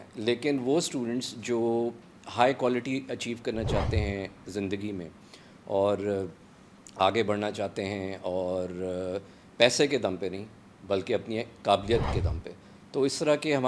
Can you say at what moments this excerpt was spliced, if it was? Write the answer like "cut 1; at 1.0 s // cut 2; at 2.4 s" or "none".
none